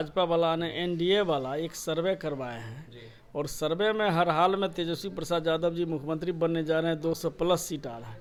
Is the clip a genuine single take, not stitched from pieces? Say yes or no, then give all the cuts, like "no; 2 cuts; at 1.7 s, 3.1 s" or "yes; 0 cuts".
yes; 0 cuts